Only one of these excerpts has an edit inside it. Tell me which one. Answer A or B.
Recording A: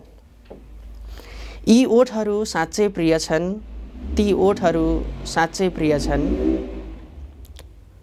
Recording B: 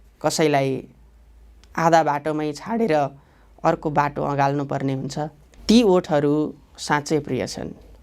B